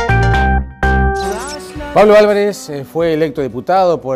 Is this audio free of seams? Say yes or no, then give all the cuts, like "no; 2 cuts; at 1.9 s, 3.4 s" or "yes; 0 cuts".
yes; 0 cuts